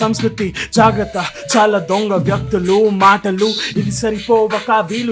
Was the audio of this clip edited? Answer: no; 0 cuts

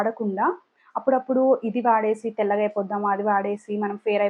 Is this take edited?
no; 0 cuts

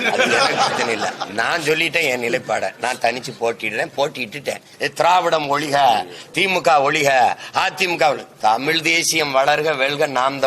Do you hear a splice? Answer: yes; 1 cut; at 4.7 s

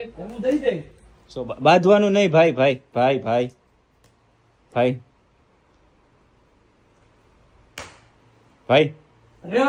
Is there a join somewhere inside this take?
no; 0 cuts

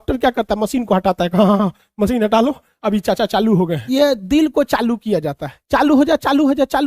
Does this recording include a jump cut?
yes; 1 cut; at 3.8 s

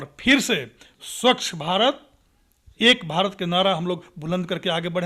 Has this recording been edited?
no; 0 cuts

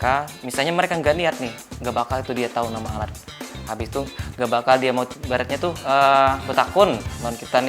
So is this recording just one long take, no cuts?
no; 2 cuts; at 1.7 s, 5.2 s

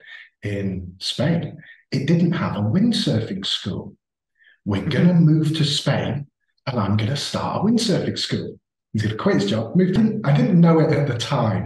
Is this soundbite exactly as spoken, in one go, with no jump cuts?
no; 1 cut; at 10.0 s

